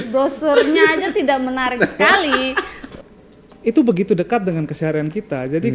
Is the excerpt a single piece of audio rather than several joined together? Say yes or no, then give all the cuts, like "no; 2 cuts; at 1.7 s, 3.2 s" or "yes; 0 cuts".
no; 1 cut; at 2.9 s